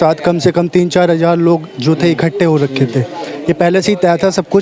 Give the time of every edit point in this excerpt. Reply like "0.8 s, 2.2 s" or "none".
none